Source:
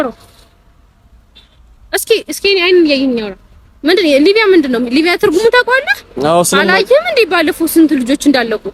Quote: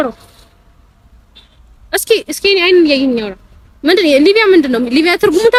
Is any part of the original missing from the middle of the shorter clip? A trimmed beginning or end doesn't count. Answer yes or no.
no